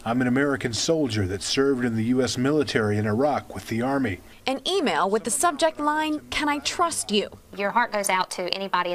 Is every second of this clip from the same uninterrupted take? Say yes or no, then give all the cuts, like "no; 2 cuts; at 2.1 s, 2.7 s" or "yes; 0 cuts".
no; 1 cut; at 2.3 s